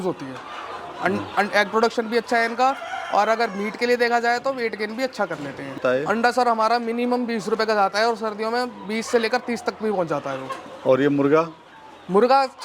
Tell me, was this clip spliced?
yes; 1 cut; at 5.8 s

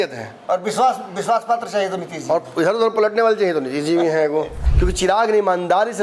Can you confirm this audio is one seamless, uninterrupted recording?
no; 1 cut; at 4.6 s

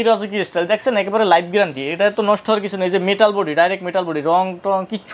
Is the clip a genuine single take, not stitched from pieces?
yes; 0 cuts

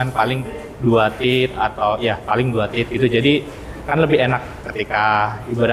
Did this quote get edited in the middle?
no; 0 cuts

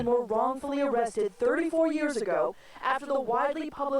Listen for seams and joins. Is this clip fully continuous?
no; 1 cut; at 1.1 s

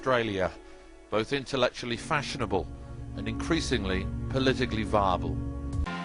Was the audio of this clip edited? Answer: no; 0 cuts

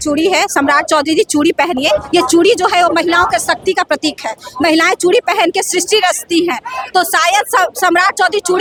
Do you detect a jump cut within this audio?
no; 0 cuts

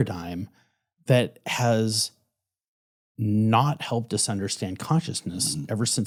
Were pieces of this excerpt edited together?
no; 0 cuts

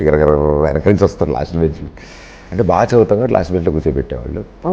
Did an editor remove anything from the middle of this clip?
no; 0 cuts

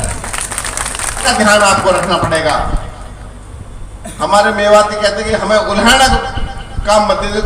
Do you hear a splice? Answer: yes; 1 cut; at 1.2 s

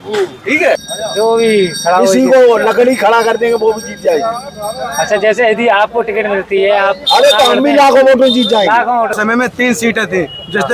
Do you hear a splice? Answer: yes; 2 cuts; at 0.9 s, 9.2 s

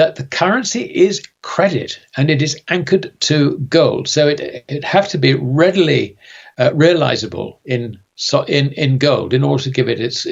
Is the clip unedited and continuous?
yes; 0 cuts

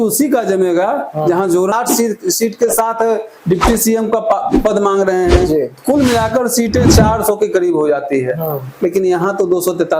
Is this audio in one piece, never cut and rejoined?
no; 1 cut; at 1.7 s

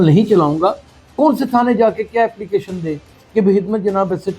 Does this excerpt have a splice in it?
yes; 1 cut; at 1.0 s

